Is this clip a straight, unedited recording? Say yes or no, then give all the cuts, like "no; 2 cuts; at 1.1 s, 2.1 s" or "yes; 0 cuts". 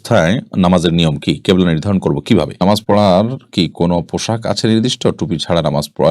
no; 1 cut; at 2.5 s